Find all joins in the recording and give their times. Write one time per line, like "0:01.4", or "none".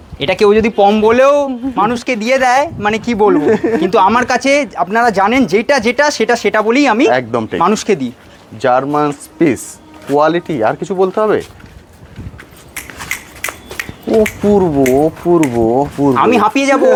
none